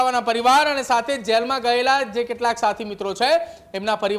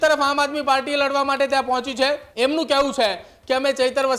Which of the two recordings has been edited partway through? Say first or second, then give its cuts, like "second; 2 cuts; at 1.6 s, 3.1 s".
second; 1 cut; at 2.3 s